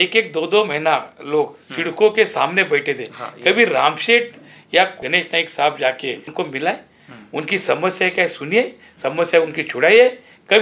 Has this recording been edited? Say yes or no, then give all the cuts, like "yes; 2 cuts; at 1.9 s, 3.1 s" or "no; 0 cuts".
yes; 2 cuts; at 5.0 s, 6.3 s